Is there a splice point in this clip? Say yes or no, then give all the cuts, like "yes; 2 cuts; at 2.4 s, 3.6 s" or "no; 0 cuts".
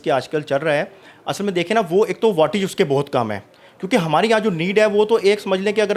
no; 0 cuts